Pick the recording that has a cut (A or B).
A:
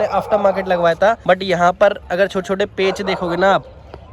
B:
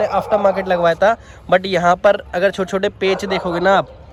A